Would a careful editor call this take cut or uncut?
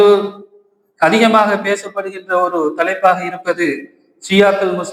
uncut